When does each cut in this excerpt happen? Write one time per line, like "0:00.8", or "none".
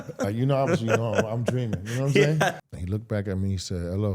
0:02.5